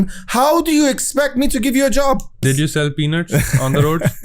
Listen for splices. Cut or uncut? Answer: cut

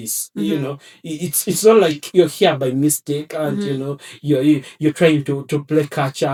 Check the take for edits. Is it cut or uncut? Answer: uncut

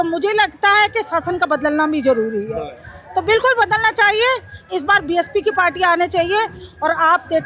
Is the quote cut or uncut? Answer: uncut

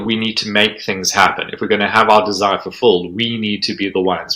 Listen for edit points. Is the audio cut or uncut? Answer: uncut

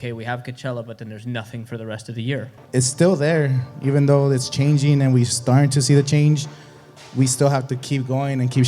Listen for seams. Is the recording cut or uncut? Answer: cut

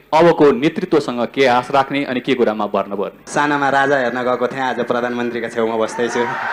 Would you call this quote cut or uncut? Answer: cut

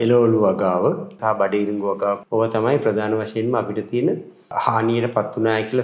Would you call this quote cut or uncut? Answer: cut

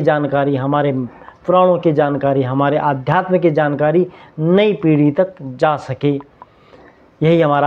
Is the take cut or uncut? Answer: uncut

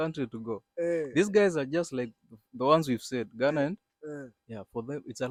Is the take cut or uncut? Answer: uncut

